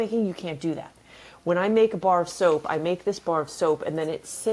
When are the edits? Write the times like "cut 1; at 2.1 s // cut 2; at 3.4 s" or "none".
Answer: none